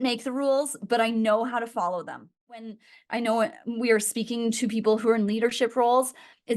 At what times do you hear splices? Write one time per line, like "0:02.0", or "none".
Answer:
0:02.7